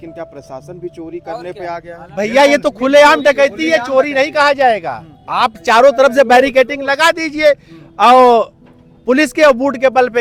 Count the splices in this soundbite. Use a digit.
0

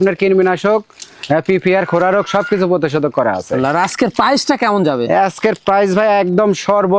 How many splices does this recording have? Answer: 1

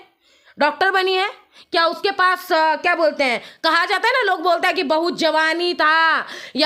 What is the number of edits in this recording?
0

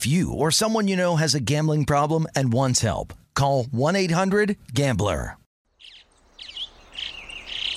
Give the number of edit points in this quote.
1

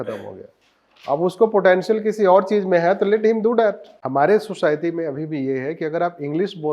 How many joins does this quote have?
1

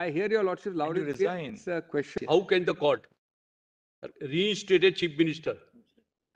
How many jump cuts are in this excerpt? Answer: 1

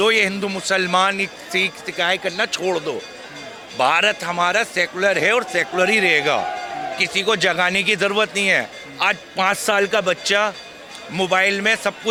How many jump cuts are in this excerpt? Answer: 0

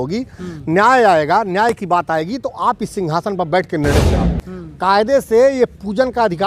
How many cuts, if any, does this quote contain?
1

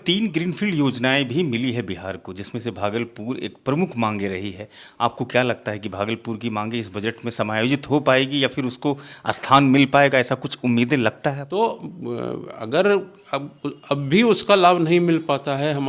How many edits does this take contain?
1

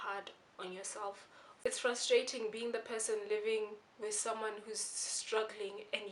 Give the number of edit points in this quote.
0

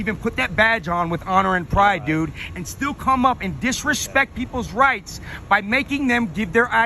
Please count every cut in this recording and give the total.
0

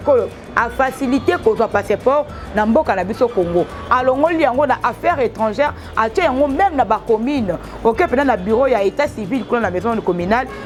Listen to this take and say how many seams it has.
0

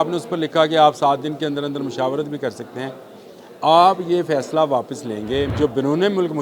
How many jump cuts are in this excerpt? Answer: 1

